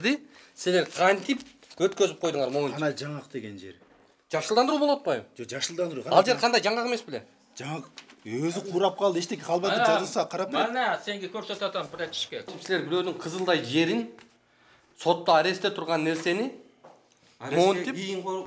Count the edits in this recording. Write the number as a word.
one